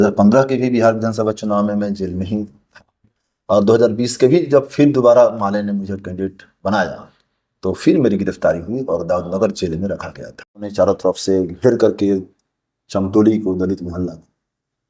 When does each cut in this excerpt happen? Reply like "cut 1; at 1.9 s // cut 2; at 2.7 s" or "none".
cut 1; at 10.7 s